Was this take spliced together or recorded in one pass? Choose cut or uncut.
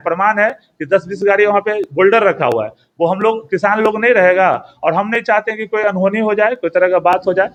uncut